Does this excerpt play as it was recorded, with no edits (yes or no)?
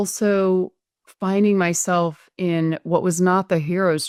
yes